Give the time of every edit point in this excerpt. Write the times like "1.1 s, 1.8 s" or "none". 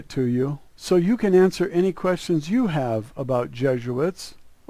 1.9 s